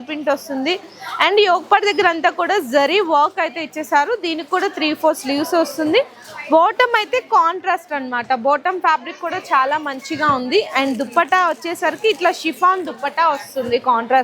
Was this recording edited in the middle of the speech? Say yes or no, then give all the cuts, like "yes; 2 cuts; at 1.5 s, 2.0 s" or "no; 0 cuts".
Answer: no; 0 cuts